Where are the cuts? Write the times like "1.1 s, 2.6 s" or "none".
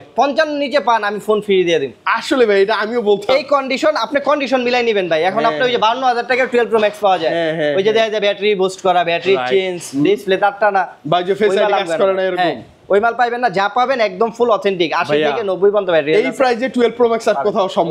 none